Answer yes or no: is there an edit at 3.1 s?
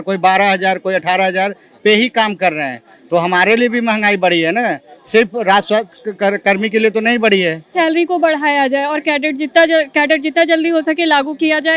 no